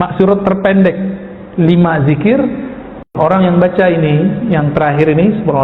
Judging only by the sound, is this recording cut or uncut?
cut